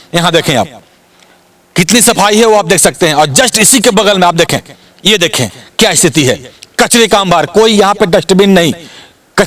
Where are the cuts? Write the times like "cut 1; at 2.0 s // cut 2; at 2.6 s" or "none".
none